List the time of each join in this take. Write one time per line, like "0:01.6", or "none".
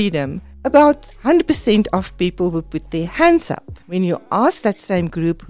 none